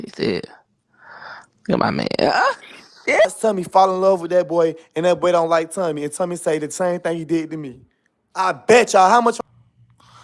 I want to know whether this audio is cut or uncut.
cut